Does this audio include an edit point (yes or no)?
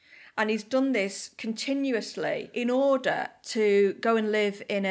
yes